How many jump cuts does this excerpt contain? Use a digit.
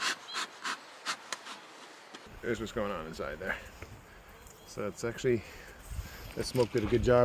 1